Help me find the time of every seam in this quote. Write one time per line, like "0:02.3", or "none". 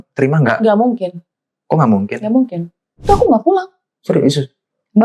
0:03.1